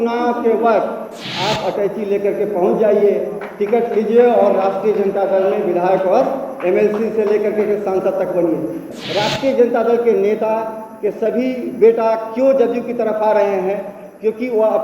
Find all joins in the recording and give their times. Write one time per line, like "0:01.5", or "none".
0:08.9